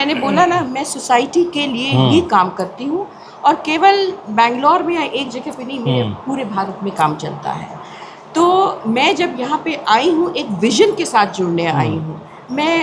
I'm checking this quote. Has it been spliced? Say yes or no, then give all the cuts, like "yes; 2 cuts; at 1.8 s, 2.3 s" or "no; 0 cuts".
no; 0 cuts